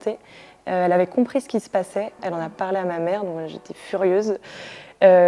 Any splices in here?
yes; 1 cut; at 2.1 s

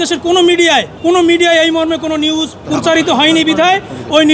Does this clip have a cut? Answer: yes; 2 cuts; at 0.9 s, 2.6 s

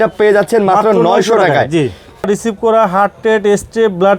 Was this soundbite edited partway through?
yes; 1 cut; at 2.3 s

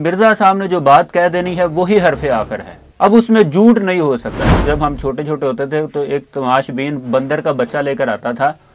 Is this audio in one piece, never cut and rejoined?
no; 1 cut; at 4.5 s

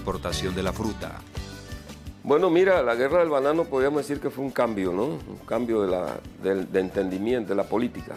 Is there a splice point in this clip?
yes; 1 cut; at 6.1 s

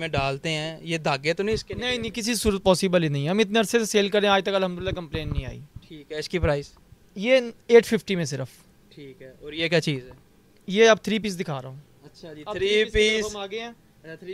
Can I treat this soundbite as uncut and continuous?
yes; 0 cuts

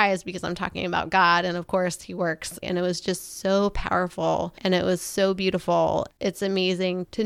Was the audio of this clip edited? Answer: yes; 3 cuts; at 2.6 s, 4.5 s, 6.1 s

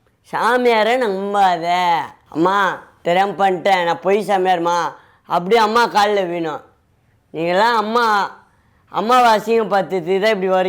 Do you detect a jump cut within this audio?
yes; 1 cut; at 2.2 s

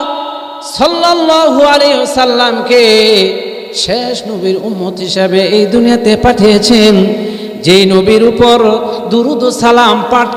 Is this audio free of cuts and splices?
yes; 0 cuts

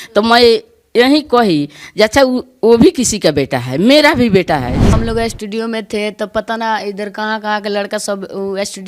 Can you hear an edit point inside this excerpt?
yes; 1 cut; at 4.9 s

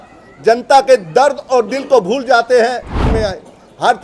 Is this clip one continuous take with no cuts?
no; 1 cut; at 3.1 s

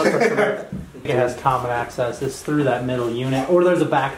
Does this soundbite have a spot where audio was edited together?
yes; 1 cut; at 1.1 s

